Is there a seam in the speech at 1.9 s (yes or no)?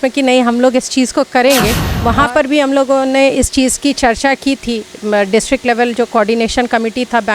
yes